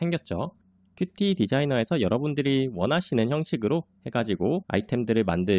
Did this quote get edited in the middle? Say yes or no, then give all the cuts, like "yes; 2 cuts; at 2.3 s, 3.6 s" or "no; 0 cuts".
yes; 1 cut; at 4.7 s